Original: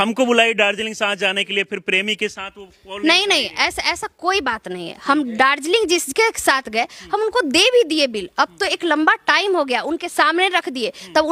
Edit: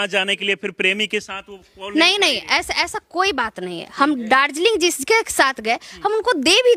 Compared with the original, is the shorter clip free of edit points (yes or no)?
yes